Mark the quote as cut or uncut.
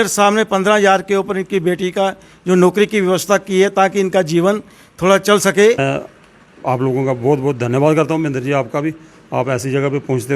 cut